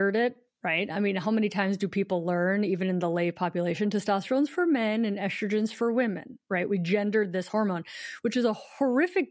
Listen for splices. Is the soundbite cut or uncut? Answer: uncut